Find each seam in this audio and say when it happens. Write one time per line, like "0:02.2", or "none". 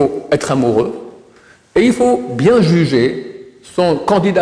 none

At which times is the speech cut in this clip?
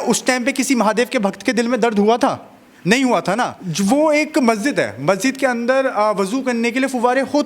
0:03.6

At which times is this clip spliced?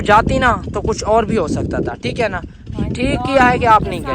none

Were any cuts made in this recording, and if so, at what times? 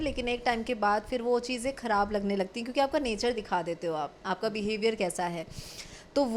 none

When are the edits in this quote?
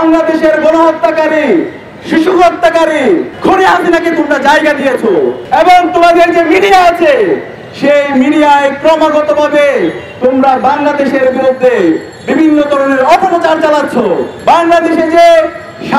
0:03.3
0:05.4
0:14.3

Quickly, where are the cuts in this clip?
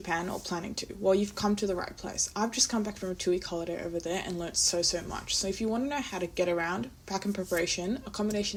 none

